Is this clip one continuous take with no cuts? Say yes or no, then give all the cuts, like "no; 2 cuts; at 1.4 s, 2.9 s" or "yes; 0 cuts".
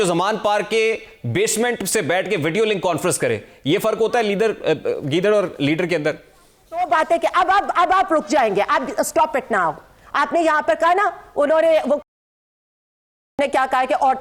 yes; 0 cuts